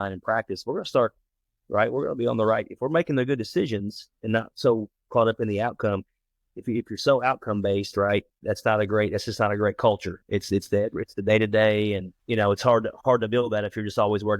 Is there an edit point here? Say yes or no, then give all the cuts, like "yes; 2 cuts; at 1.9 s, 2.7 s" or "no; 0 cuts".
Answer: yes; 1 cut; at 12.1 s